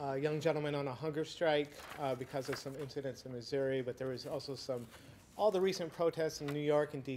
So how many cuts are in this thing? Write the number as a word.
one